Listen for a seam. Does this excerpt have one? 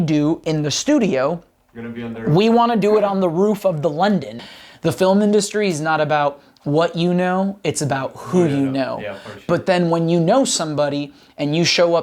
yes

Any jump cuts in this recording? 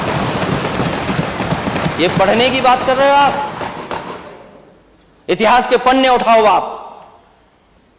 no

